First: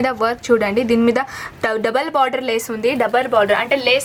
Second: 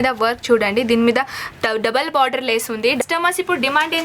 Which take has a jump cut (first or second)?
second